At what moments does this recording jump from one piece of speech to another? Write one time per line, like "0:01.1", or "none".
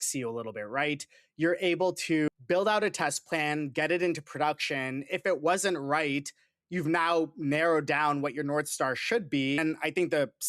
0:02.3
0:09.6